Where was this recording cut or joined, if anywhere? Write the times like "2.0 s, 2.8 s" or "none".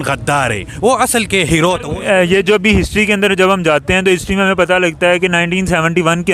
1.9 s